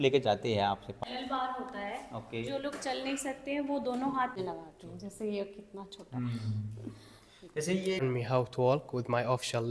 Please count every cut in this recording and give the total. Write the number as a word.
three